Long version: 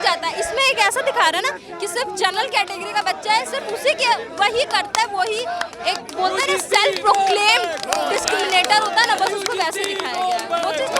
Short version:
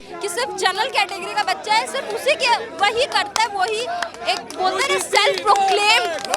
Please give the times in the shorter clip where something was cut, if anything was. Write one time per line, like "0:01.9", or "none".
none